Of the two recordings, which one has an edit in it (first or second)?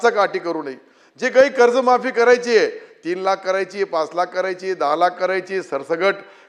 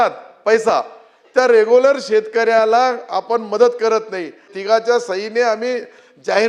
second